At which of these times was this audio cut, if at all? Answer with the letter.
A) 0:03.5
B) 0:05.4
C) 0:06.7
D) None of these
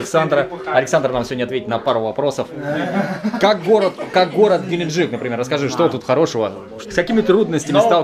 C